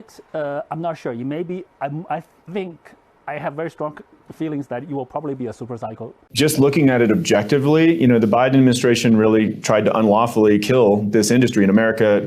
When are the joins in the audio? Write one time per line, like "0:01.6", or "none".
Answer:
0:06.2